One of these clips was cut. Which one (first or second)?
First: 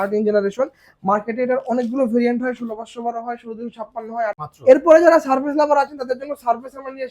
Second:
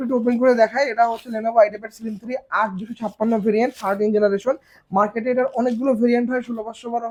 first